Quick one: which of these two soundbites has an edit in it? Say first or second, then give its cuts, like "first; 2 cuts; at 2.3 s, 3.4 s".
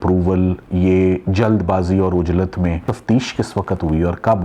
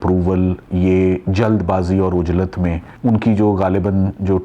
first; 1 cut; at 2.9 s